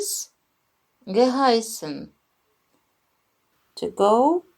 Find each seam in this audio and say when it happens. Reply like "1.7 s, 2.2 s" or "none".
3.1 s